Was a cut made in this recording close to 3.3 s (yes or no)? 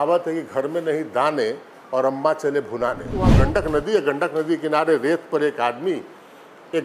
yes